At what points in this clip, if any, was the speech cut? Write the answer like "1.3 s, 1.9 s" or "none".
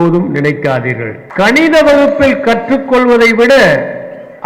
1.2 s